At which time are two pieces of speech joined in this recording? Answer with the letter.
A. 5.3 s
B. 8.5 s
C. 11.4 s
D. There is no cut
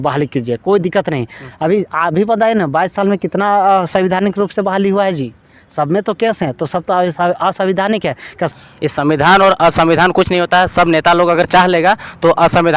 B